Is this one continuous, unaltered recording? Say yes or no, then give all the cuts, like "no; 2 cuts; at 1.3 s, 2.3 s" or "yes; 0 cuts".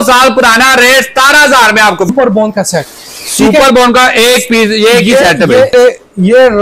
no; 2 cuts; at 2.1 s, 5.7 s